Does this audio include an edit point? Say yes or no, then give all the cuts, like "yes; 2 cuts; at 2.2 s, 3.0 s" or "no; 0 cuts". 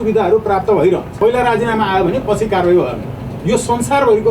yes; 1 cut; at 1.1 s